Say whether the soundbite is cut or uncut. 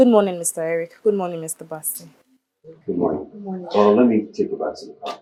uncut